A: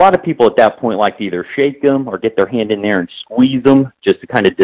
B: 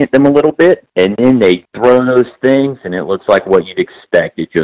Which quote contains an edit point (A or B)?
B